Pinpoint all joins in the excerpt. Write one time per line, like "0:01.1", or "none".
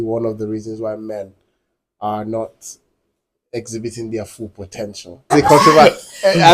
0:05.3